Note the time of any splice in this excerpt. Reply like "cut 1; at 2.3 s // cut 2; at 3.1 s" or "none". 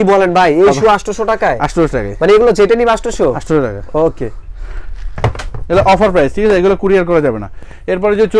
none